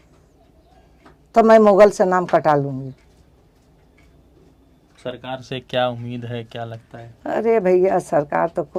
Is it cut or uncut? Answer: uncut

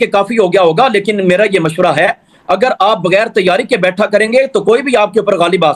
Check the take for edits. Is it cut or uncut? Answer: uncut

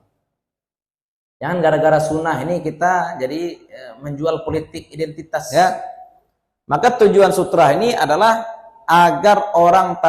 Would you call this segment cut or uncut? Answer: cut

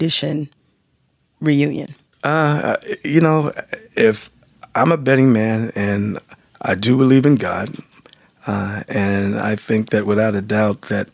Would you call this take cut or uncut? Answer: uncut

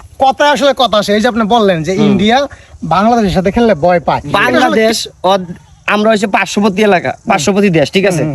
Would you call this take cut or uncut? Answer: cut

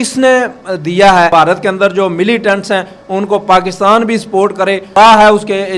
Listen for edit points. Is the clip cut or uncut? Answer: cut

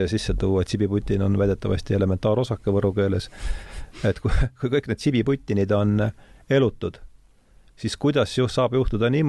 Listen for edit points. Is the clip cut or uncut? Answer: uncut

